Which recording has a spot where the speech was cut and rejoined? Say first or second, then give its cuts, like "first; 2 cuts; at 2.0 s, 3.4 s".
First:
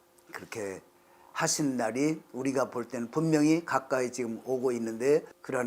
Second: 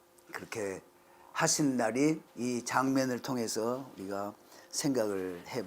second; 1 cut; at 2.3 s